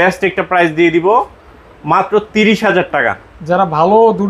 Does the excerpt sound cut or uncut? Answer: uncut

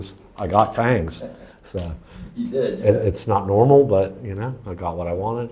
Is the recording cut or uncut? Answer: uncut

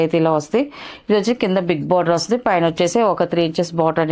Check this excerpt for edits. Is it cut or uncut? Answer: uncut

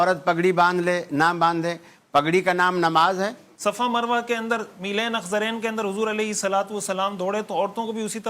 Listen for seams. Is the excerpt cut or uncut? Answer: cut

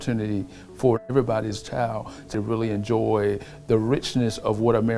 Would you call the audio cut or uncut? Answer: cut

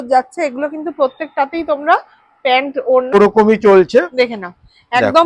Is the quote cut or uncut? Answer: cut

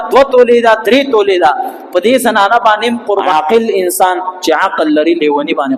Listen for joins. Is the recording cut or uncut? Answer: cut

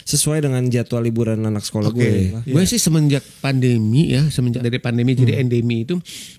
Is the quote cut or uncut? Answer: cut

